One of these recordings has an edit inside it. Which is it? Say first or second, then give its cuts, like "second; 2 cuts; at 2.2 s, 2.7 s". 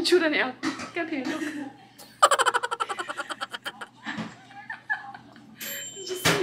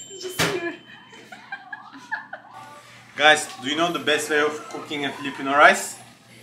second; 1 cut; at 2.6 s